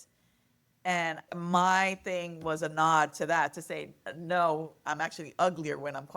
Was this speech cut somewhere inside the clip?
yes; 1 cut; at 4.7 s

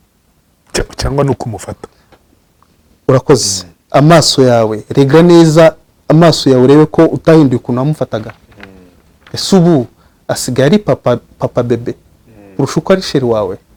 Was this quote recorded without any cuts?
yes; 0 cuts

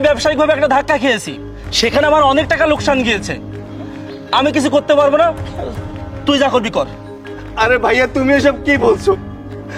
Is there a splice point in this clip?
no; 0 cuts

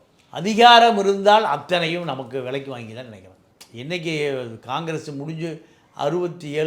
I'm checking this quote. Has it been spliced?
no; 0 cuts

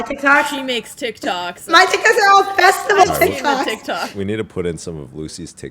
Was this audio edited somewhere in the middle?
yes; 1 cut; at 4.1 s

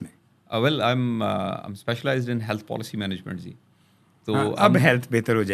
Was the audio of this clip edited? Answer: no; 0 cuts

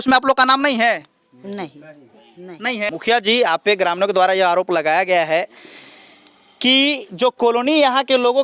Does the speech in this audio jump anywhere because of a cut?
yes; 1 cut; at 2.9 s

